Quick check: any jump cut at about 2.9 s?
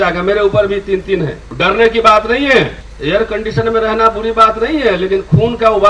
yes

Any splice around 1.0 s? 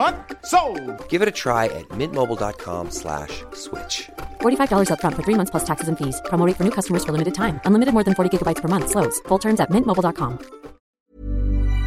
no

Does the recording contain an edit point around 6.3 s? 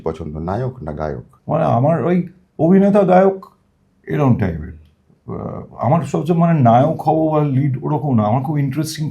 no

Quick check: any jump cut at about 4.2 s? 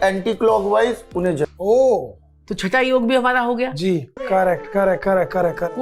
yes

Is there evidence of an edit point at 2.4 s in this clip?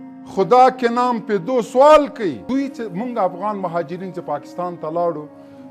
yes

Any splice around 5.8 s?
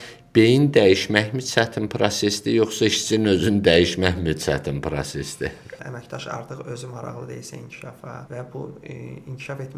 yes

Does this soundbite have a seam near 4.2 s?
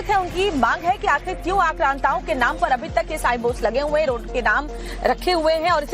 yes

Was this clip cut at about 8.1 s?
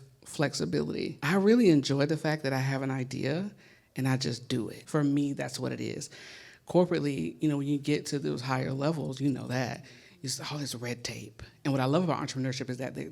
no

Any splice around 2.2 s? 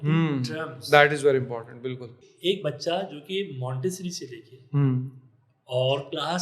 yes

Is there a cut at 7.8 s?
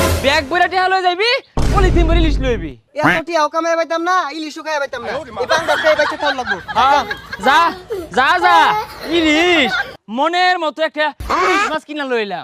no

